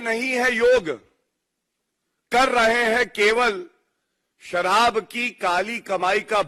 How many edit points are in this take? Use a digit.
0